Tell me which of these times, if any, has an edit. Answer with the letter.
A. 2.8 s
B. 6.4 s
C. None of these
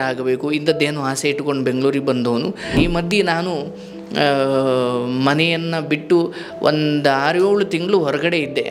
A